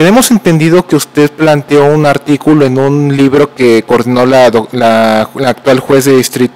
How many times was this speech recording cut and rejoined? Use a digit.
1